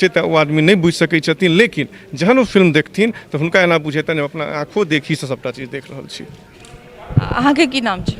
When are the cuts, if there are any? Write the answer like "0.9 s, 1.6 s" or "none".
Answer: none